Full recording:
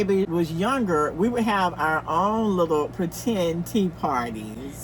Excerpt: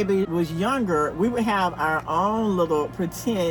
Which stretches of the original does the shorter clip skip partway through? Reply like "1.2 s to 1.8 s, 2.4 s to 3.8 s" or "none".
none